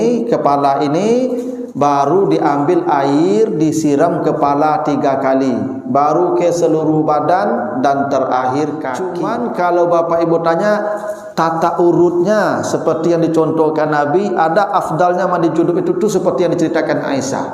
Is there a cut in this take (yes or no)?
yes